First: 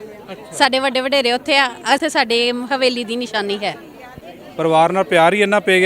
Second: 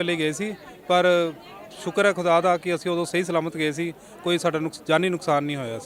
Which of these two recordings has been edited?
first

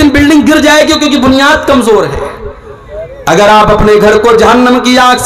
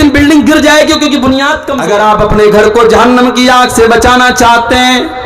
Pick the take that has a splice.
second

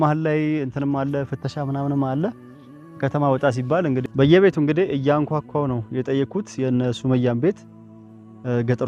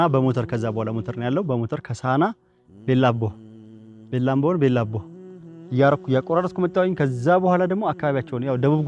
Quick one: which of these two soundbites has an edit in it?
first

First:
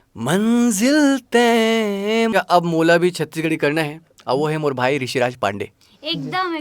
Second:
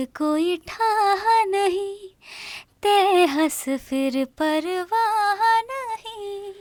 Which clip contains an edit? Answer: first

